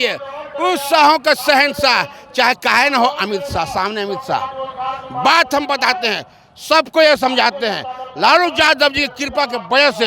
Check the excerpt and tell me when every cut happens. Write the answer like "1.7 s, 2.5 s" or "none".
none